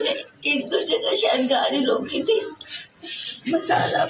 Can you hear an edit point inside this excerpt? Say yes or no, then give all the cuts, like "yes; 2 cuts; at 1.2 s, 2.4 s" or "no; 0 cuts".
no; 0 cuts